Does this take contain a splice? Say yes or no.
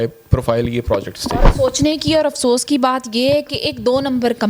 no